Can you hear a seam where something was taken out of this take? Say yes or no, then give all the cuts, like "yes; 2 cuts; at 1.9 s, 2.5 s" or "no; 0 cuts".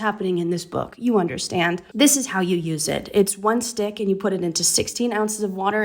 no; 0 cuts